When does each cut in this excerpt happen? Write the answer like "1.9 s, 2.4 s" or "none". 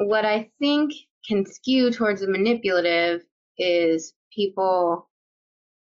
1.1 s